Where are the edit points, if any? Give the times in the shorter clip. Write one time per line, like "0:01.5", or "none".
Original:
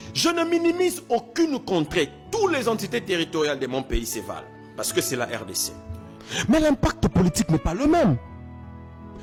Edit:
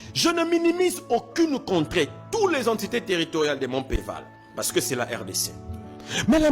0:04.0

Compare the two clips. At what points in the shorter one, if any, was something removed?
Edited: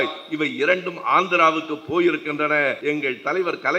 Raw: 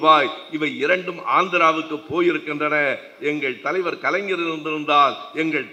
0:02.8

